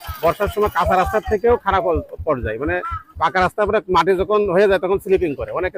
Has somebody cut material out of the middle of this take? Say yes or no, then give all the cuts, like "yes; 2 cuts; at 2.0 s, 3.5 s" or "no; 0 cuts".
no; 0 cuts